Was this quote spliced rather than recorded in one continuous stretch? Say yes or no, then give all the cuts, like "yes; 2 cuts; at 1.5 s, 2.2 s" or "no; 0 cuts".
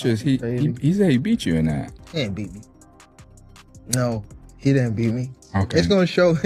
no; 0 cuts